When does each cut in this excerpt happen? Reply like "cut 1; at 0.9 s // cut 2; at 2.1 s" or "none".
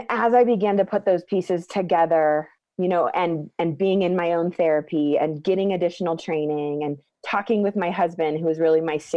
cut 1; at 2.6 s